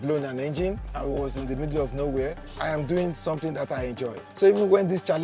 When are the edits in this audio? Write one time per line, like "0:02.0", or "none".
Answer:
0:00.9
0:02.5
0:04.2